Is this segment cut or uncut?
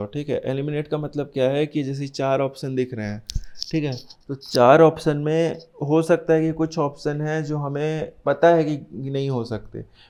uncut